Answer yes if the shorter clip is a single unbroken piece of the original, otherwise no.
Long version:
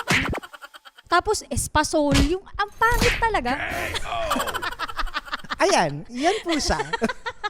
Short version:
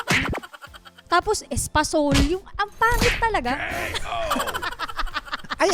yes